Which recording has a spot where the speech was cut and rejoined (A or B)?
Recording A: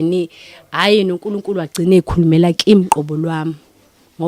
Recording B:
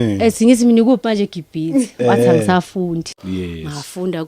B